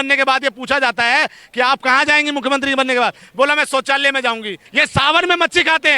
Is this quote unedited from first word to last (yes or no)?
no